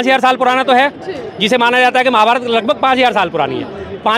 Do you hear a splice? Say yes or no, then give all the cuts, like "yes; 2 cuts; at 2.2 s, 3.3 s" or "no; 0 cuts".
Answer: no; 0 cuts